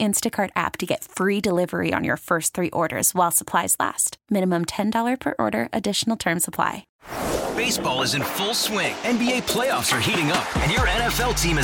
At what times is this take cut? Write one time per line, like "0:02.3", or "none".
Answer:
0:06.9